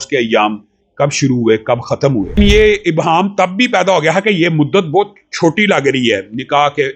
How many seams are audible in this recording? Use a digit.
1